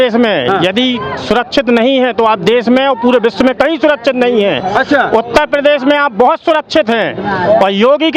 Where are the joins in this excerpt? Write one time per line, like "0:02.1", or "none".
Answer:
none